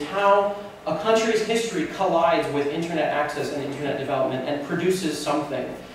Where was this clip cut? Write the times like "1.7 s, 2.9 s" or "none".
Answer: 1.4 s

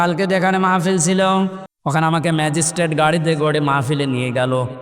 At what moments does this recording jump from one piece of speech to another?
1.6 s

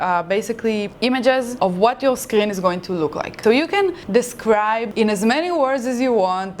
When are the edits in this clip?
0.9 s, 1.5 s, 3.4 s, 4.0 s, 4.9 s

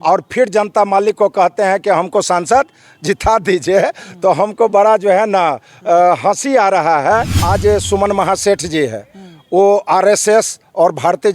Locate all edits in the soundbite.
7.4 s

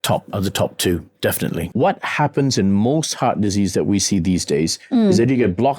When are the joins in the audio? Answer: 1.7 s

